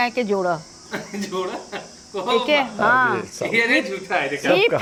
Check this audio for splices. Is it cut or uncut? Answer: uncut